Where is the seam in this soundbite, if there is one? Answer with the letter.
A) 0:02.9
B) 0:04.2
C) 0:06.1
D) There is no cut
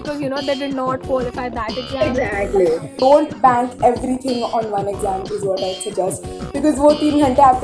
A